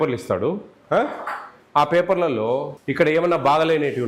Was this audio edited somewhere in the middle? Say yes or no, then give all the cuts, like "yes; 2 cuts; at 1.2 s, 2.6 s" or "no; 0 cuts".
yes; 1 cut; at 2.8 s